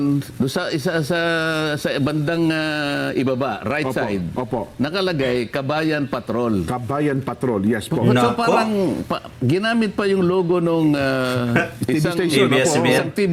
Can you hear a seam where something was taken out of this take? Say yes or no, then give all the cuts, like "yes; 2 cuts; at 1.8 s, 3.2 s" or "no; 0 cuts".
no; 0 cuts